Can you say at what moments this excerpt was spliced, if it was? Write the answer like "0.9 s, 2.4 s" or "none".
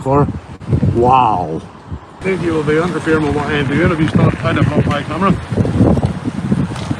2.2 s